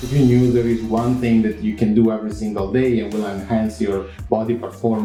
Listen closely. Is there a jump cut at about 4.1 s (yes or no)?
no